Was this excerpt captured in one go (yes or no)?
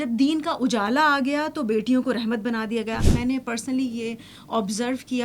no